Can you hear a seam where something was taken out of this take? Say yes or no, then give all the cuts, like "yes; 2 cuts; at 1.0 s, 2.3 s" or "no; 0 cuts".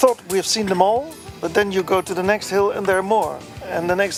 no; 0 cuts